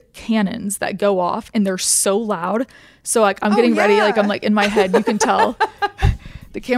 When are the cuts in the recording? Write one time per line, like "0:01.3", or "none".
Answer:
none

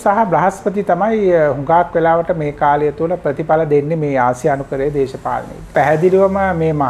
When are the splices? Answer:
0:05.7

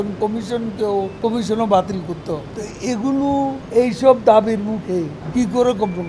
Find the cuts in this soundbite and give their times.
0:01.1
0:02.6
0:03.6
0:05.2

